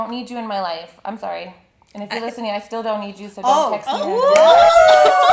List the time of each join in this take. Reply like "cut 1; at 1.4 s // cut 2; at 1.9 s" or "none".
none